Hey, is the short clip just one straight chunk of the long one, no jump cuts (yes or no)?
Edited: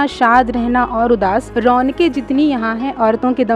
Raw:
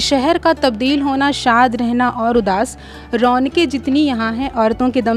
no